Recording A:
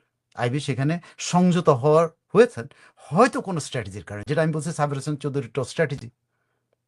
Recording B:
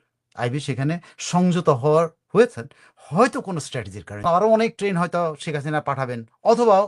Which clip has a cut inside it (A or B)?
B